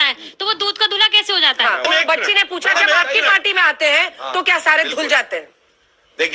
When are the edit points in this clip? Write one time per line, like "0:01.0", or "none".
none